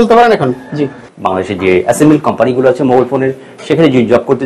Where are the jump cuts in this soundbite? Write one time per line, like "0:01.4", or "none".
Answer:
0:01.0